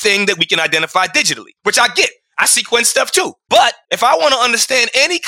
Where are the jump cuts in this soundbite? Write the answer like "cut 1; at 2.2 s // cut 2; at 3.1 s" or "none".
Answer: cut 1; at 3.7 s